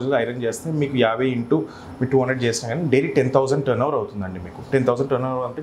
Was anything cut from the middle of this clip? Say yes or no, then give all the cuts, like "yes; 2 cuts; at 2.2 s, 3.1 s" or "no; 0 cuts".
no; 0 cuts